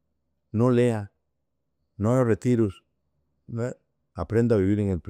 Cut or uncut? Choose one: uncut